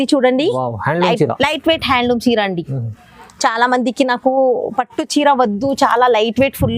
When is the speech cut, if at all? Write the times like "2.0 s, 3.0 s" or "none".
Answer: none